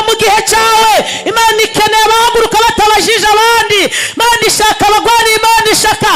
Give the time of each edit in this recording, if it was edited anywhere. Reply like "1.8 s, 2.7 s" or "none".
none